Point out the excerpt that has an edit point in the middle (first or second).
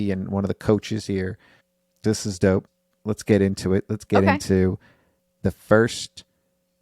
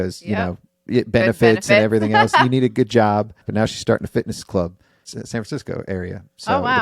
second